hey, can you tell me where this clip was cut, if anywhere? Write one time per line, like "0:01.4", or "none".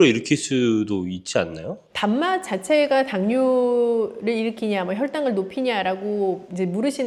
none